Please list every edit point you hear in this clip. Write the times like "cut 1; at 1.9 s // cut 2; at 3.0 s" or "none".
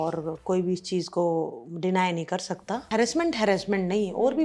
cut 1; at 2.8 s